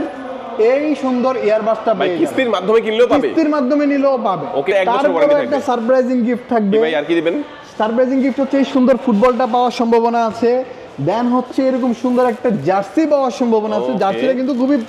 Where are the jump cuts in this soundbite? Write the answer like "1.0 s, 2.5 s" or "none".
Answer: 4.7 s